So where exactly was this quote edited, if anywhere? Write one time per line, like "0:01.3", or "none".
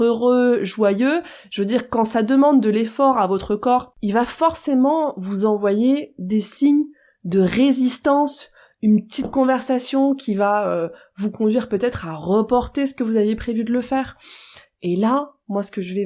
0:03.9